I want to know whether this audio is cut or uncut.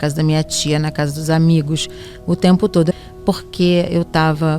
cut